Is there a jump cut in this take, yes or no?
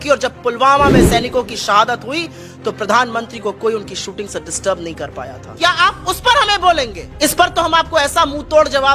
yes